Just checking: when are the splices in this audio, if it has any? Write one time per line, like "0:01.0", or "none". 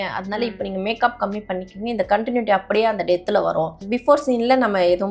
0:03.8